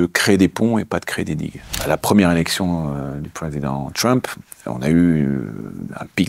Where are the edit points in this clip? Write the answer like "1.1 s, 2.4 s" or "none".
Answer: 1.7 s